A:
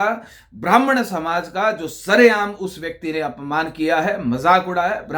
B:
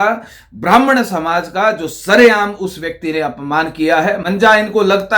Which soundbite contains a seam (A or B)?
B